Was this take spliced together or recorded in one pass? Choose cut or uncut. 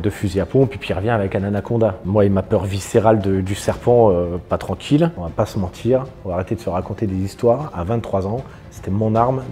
cut